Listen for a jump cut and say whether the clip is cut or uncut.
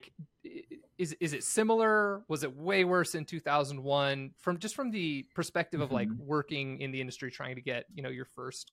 uncut